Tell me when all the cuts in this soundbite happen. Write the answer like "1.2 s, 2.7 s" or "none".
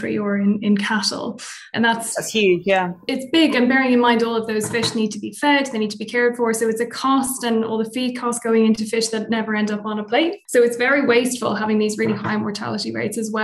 1.7 s, 3.0 s, 10.4 s